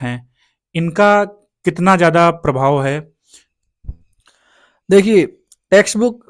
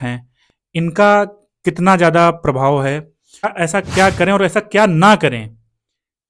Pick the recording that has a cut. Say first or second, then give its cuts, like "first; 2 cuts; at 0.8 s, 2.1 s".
second; 1 cut; at 3.5 s